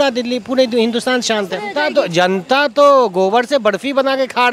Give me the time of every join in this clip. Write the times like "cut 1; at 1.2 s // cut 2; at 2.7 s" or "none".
cut 1; at 1.7 s